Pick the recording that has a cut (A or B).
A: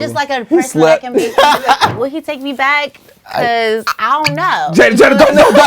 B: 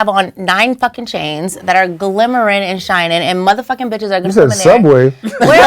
A